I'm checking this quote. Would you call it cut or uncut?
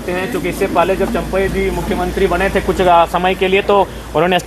uncut